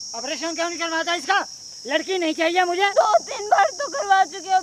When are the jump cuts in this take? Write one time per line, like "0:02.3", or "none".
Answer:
0:02.9